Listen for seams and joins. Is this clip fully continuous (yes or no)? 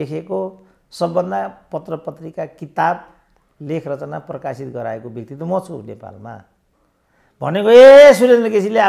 yes